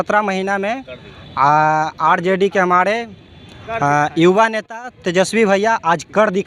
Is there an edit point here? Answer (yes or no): no